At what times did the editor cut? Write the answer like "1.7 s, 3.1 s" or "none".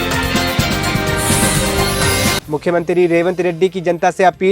2.4 s